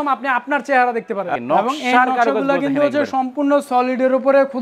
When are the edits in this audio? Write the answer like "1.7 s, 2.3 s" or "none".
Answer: 1.3 s

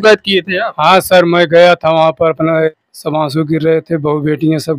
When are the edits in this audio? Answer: 2.7 s

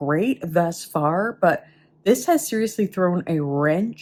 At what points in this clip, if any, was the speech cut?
none

